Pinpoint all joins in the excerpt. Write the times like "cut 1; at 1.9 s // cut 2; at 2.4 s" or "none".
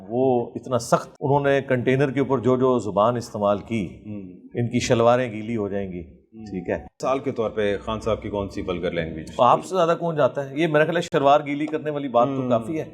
cut 1; at 5.9 s // cut 2; at 6.9 s // cut 3; at 11.0 s